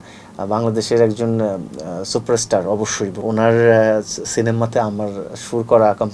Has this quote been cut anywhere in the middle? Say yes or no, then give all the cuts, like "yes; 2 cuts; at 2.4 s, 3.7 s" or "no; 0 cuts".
yes; 1 cut; at 3.2 s